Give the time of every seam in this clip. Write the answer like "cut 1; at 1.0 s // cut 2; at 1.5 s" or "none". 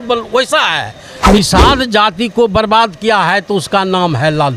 cut 1; at 1.3 s